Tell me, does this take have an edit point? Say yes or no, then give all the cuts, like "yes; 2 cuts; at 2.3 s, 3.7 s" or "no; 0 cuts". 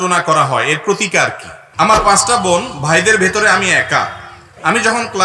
yes; 1 cut; at 1.6 s